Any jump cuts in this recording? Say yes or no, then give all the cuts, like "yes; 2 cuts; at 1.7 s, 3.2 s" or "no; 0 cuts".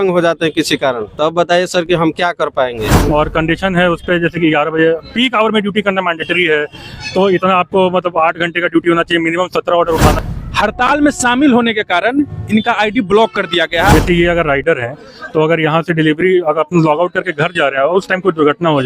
yes; 4 cuts; at 1.1 s, 2.9 s, 10.2 s, 13.9 s